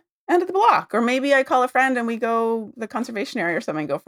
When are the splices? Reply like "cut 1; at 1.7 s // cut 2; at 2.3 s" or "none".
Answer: cut 1; at 2.7 s

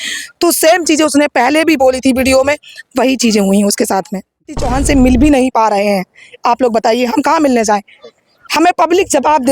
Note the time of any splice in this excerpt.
cut 1; at 4.5 s

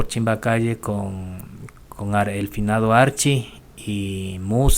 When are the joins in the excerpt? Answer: none

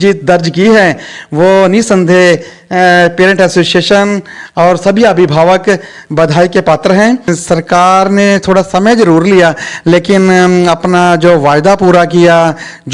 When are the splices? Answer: cut 1; at 7.3 s

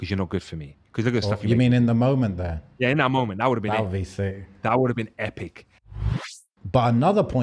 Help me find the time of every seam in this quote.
cut 1; at 6.1 s

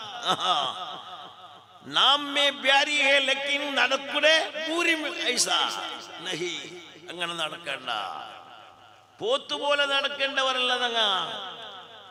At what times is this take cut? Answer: none

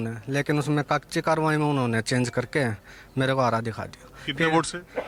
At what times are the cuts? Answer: none

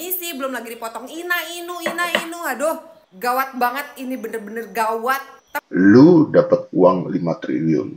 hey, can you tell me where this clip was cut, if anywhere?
cut 1; at 5.6 s

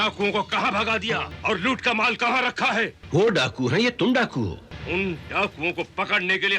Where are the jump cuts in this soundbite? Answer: cut 1; at 1.3 s // cut 2; at 3.0 s // cut 3; at 4.7 s

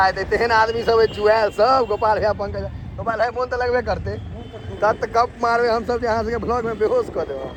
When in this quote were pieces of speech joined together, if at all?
none

